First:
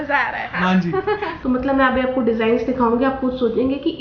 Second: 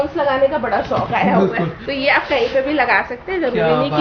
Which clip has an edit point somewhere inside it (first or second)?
first